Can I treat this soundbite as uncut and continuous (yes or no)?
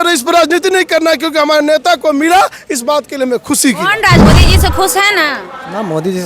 no